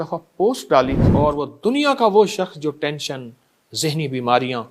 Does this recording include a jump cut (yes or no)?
yes